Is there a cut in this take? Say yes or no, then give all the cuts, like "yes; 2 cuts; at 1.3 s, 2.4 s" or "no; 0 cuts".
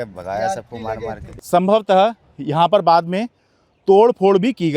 yes; 1 cut; at 1.2 s